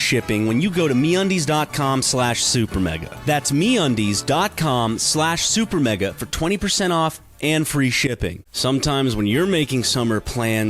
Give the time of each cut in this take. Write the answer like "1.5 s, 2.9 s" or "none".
8.5 s